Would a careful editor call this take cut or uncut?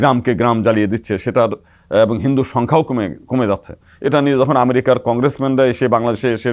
uncut